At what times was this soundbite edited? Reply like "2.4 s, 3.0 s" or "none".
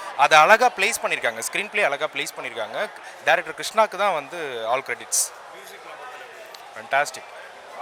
none